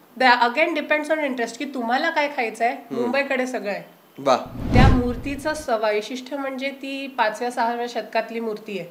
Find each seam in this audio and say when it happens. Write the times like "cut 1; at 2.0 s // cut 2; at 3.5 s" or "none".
cut 1; at 4.7 s